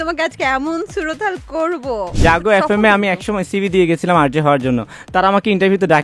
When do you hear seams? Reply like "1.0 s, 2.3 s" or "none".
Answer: 2.2 s